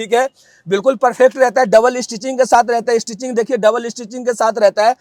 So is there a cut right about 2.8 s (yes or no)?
no